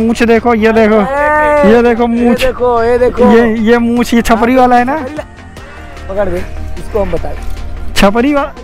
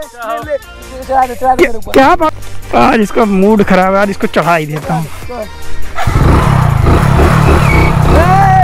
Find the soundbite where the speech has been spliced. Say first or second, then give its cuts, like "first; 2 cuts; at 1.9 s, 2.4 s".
second; 1 cut; at 2.3 s